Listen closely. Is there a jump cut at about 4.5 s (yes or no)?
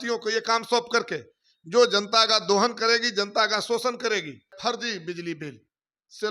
yes